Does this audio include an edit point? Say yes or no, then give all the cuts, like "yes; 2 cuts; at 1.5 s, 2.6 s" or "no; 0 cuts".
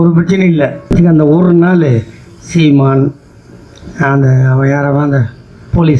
yes; 1 cut; at 0.9 s